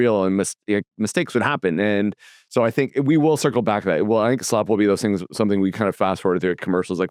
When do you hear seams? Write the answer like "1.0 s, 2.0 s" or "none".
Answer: none